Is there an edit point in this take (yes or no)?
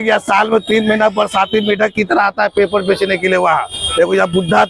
no